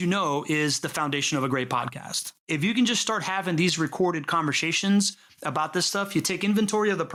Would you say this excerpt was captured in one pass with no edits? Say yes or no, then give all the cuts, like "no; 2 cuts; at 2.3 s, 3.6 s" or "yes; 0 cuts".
yes; 0 cuts